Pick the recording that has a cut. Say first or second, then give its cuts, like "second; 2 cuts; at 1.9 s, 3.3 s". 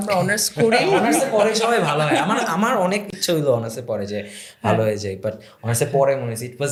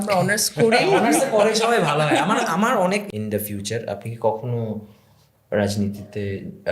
second; 1 cut; at 3.1 s